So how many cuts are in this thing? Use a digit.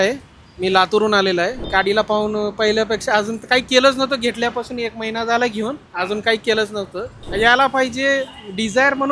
2